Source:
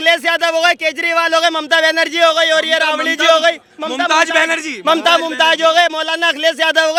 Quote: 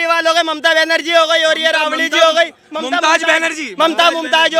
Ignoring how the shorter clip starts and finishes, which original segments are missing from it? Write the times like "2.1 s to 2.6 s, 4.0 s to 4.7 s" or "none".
none